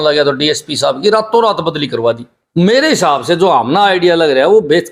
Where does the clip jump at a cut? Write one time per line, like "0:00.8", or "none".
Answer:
0:02.3